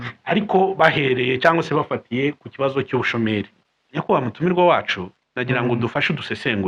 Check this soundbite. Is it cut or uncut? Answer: cut